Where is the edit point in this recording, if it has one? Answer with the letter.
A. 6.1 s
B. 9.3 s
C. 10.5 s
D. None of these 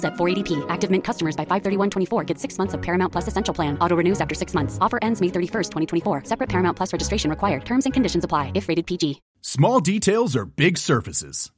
B